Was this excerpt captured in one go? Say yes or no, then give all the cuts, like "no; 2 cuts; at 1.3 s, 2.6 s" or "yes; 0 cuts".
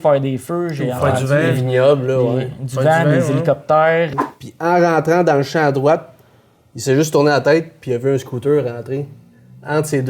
no; 1 cut; at 4.1 s